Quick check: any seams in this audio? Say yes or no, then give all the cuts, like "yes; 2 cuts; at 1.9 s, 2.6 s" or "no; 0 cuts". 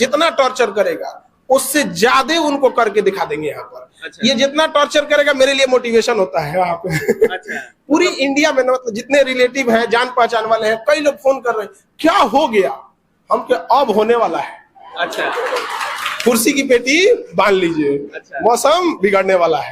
no; 0 cuts